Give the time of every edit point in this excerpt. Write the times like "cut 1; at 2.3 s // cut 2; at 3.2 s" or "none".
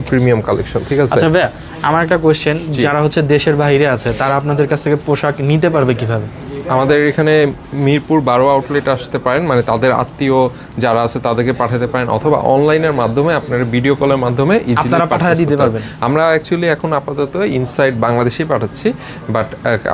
none